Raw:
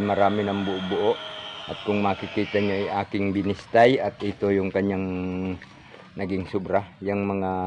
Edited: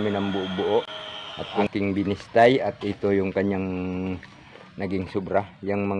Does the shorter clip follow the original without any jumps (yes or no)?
no